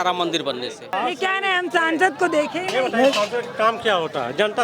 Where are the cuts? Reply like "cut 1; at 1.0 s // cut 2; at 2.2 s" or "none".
cut 1; at 1.0 s